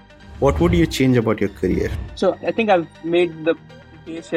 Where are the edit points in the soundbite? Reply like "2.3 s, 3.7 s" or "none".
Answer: 2.4 s

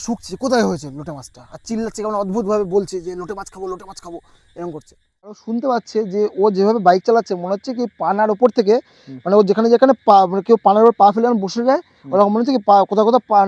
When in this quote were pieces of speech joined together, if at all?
5.4 s

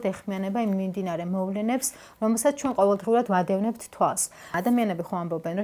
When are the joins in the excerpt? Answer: 4.5 s

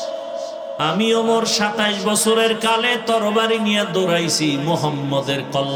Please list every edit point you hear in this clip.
none

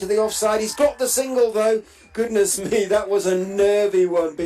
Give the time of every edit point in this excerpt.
1.7 s

